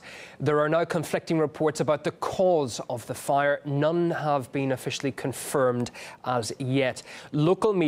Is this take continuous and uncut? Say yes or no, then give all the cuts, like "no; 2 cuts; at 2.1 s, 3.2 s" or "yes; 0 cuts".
no; 1 cut; at 6.0 s